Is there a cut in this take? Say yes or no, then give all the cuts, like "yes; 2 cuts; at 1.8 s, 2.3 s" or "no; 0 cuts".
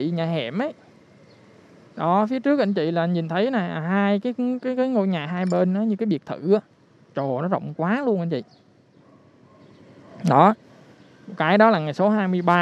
no; 0 cuts